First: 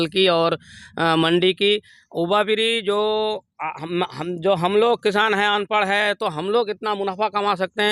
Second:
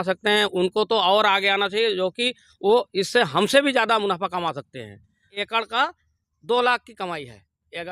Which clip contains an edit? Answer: second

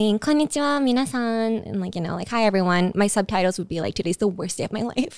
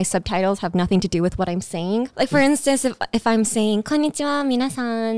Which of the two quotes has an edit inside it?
second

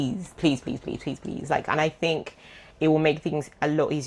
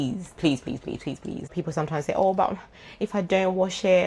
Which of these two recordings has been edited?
second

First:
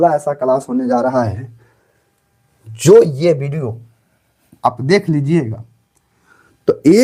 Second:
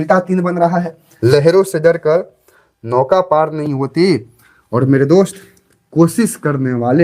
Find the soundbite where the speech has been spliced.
second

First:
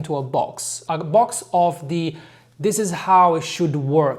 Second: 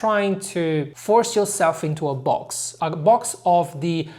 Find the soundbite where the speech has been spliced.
second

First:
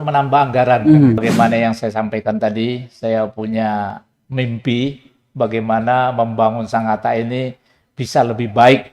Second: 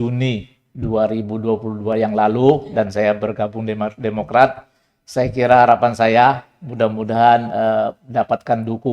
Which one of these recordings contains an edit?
first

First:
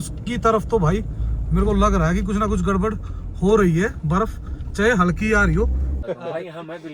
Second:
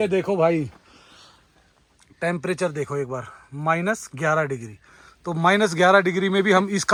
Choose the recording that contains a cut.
first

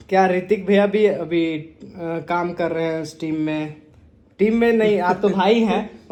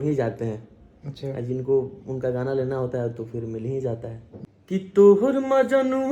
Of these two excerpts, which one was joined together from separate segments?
second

